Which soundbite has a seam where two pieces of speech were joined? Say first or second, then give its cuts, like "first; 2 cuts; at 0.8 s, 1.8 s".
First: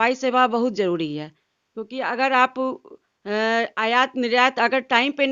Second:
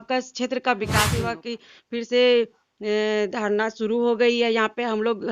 second; 1 cut; at 1.1 s